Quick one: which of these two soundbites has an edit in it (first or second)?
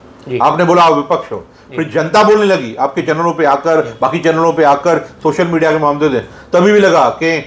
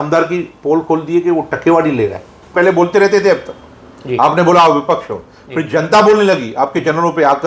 second